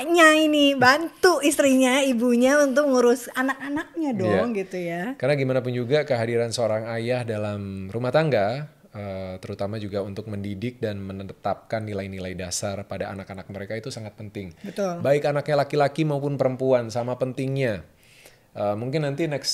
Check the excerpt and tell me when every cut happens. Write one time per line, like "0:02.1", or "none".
none